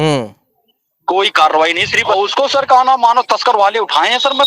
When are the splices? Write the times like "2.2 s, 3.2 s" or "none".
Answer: 2.1 s